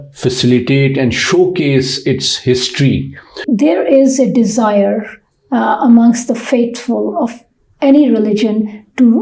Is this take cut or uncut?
cut